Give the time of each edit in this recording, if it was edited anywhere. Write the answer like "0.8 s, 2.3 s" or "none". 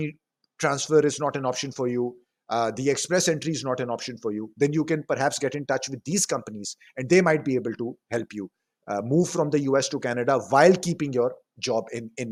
none